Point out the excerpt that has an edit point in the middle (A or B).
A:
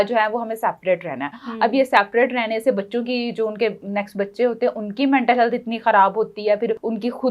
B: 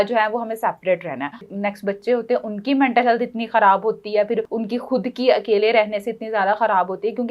B